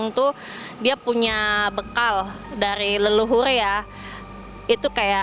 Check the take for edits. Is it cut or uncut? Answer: uncut